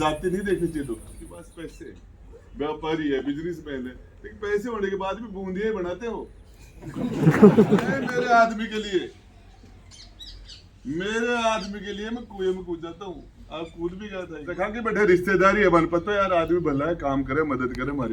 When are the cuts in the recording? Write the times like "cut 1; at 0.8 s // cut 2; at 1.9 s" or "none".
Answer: cut 1; at 1.3 s // cut 2; at 8.0 s // cut 3; at 14.7 s